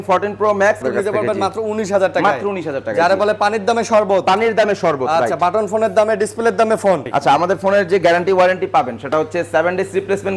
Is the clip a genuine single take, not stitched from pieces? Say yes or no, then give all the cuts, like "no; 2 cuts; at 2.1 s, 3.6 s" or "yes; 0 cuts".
no; 2 cuts; at 0.8 s, 7.1 s